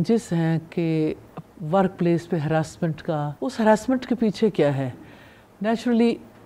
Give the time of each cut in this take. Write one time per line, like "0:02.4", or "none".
0:03.3